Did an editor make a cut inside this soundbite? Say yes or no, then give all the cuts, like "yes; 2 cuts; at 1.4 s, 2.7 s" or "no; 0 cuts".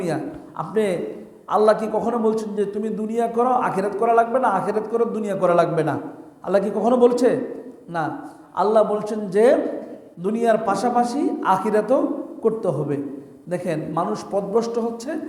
no; 0 cuts